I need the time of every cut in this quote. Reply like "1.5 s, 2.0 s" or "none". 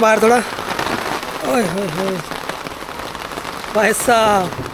none